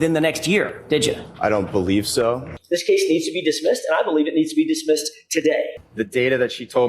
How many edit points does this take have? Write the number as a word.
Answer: two